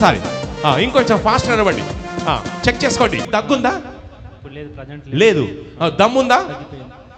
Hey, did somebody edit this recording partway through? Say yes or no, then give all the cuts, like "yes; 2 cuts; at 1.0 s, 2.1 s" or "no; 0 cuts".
yes; 1 cut; at 3.2 s